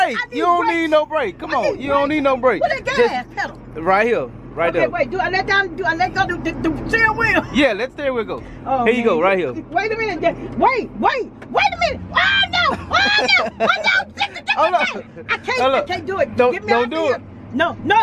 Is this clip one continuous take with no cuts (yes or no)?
yes